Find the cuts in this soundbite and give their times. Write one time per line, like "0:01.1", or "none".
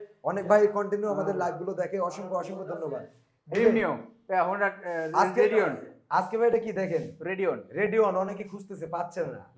none